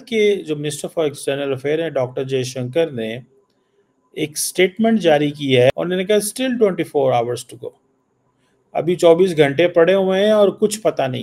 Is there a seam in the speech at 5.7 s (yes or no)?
yes